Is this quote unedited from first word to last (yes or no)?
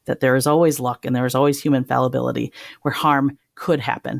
yes